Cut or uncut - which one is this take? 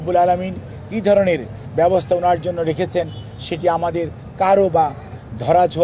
uncut